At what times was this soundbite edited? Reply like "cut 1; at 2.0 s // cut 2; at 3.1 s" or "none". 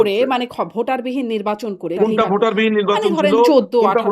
cut 1; at 2.0 s